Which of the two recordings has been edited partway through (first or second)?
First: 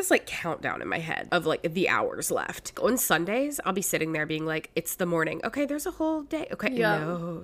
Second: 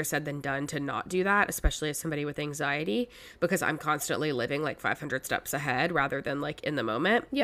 first